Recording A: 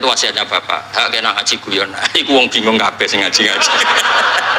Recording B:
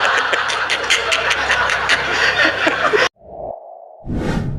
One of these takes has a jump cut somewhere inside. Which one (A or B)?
B